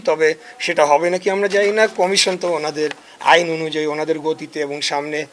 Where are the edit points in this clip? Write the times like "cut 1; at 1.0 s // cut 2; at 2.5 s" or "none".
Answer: none